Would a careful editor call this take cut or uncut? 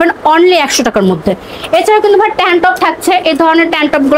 uncut